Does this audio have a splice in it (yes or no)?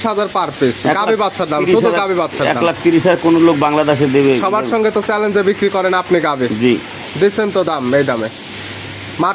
no